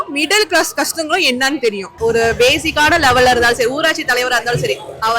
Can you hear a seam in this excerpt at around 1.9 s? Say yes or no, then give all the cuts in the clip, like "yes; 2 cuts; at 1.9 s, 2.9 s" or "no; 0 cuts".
yes; 1 cut; at 1.9 s